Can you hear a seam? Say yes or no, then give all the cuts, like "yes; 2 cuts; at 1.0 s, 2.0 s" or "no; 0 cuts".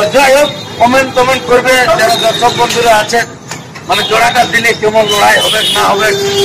no; 0 cuts